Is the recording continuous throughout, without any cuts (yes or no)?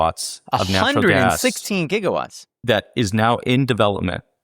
no